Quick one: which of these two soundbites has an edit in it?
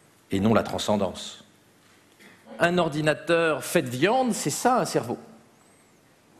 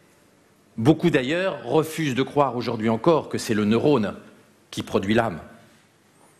first; 1 cut; at 2.5 s

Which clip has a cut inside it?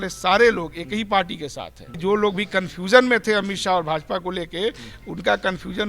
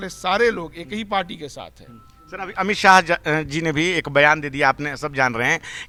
first; 1 cut; at 1.9 s

